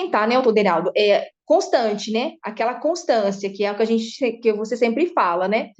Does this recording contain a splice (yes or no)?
no